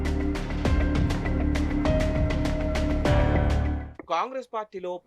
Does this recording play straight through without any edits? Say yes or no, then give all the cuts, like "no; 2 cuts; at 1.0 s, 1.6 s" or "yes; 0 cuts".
no; 1 cut; at 1.5 s